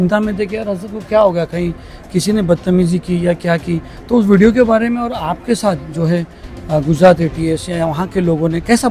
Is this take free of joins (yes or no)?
yes